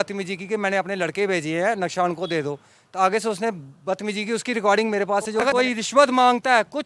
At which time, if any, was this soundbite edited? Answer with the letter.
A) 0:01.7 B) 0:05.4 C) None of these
B